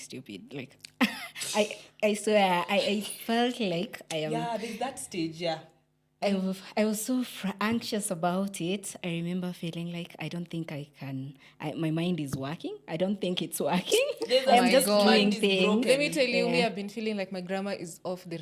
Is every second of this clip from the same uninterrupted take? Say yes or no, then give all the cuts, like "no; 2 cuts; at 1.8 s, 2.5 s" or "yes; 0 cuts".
yes; 0 cuts